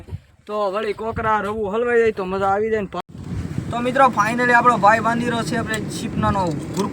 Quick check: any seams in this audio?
yes; 1 cut; at 3.0 s

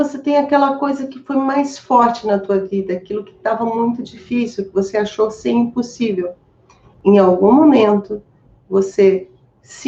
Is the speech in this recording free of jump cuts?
yes; 0 cuts

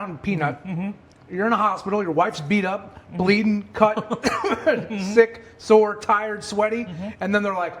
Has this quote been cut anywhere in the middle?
no; 0 cuts

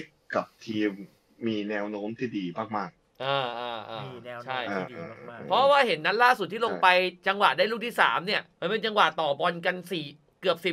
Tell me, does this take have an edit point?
no; 0 cuts

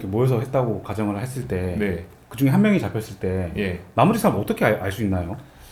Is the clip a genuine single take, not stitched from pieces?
yes; 0 cuts

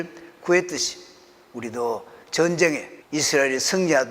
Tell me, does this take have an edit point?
yes; 1 cut; at 2.9 s

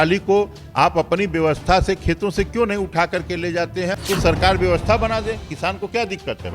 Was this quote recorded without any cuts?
no; 1 cut; at 4.0 s

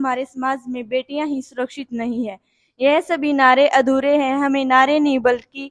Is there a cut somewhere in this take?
no; 0 cuts

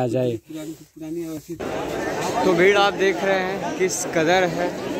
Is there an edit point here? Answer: yes; 1 cut; at 1.6 s

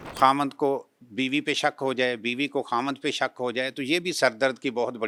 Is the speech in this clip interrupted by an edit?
no; 0 cuts

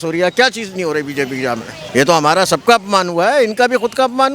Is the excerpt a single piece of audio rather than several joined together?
no; 1 cut; at 1.8 s

